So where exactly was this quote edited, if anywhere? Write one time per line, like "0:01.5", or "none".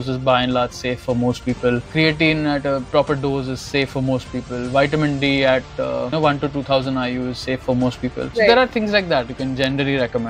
none